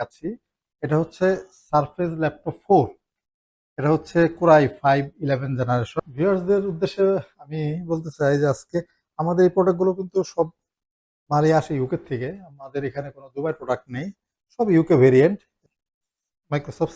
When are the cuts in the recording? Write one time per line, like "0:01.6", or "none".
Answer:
0:05.9
0:15.6

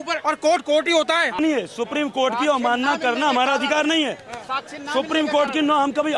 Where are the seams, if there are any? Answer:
0:01.3

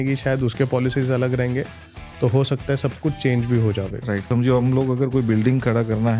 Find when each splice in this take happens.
0:04.3

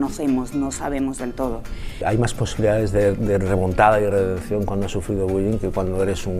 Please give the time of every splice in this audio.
0:02.0

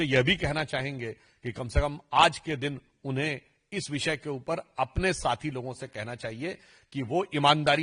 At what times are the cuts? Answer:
none

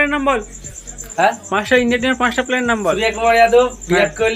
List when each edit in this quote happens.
none

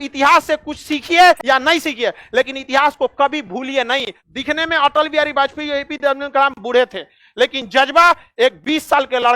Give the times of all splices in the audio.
0:01.4
0:04.2

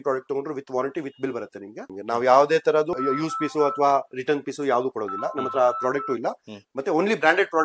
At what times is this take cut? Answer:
0:01.9
0:02.9

